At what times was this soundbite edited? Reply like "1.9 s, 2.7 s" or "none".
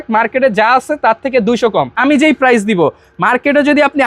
1.9 s